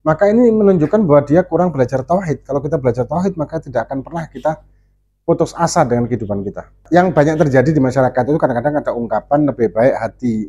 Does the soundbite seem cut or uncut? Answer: cut